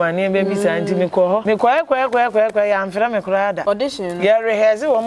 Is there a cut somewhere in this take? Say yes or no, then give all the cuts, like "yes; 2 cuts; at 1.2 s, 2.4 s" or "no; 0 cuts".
yes; 2 cuts; at 1.4 s, 3.6 s